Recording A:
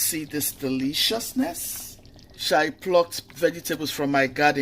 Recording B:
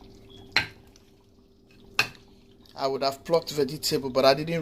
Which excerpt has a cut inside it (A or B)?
A